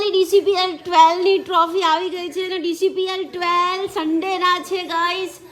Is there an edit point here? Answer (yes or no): no